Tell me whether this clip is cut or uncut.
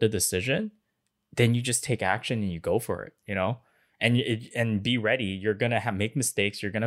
uncut